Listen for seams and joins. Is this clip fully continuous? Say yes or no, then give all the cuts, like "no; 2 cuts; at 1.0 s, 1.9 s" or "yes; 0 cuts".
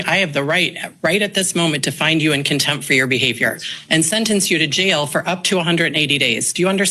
yes; 0 cuts